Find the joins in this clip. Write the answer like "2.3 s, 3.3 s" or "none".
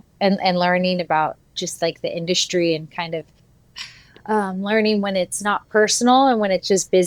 none